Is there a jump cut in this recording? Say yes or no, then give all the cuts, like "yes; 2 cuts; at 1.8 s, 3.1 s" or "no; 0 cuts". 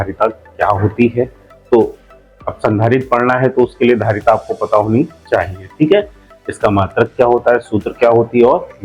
no; 0 cuts